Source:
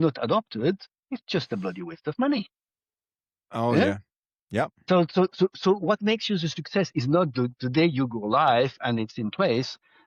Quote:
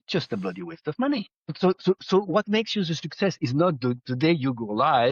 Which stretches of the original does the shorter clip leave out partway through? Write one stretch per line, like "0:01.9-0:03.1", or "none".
0:02.8-0:05.1